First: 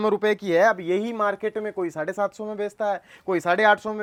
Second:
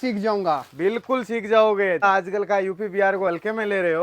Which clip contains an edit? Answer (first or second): second